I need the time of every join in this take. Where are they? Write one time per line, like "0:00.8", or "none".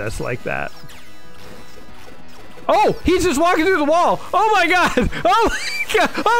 none